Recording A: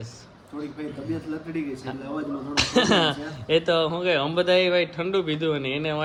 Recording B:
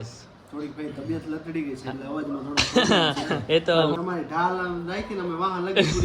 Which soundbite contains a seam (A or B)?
B